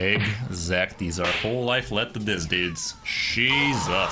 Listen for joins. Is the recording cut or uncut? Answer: uncut